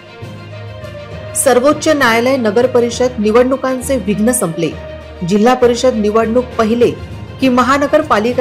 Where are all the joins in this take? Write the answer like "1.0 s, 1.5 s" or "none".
1.4 s